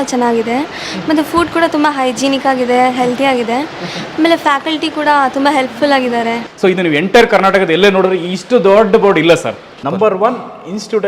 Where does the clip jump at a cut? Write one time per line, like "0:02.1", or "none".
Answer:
0:06.5
0:09.7